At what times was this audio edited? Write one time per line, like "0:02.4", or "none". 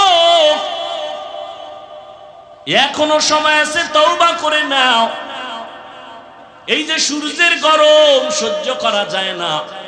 none